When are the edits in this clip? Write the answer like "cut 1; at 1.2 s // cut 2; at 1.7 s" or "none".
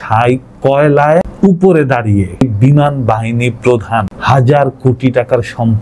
cut 1; at 1.3 s // cut 2; at 2.4 s // cut 3; at 4.1 s

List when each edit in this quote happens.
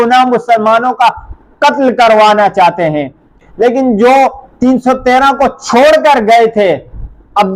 cut 1; at 3.4 s

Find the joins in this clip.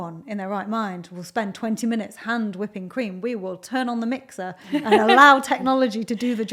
none

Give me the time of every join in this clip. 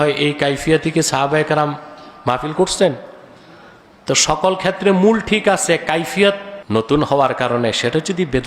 cut 1; at 6.5 s

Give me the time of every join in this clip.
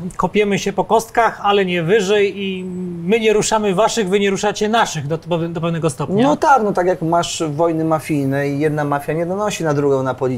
none

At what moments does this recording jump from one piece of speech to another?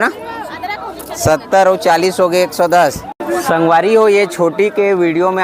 cut 1; at 3.1 s

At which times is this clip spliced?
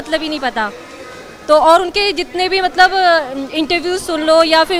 none

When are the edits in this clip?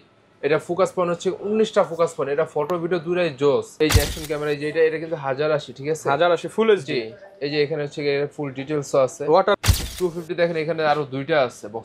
cut 1; at 3.7 s // cut 2; at 9.7 s

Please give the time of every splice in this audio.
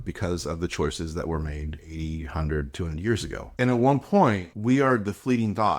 cut 1; at 3.4 s // cut 2; at 4.5 s

